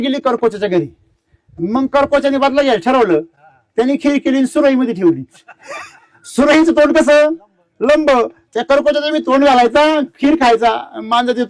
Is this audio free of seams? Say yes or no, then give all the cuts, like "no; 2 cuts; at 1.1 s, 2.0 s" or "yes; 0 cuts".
yes; 0 cuts